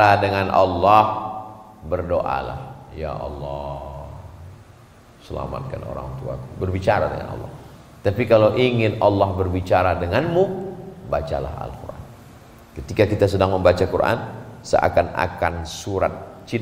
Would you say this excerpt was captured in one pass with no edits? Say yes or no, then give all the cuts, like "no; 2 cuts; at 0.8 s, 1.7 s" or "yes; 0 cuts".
yes; 0 cuts